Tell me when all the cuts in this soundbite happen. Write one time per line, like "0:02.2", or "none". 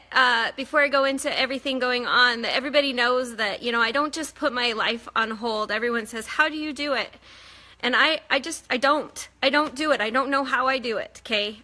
none